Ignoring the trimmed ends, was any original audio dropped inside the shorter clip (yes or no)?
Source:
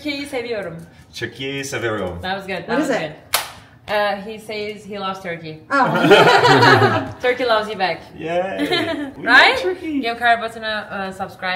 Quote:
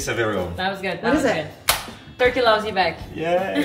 yes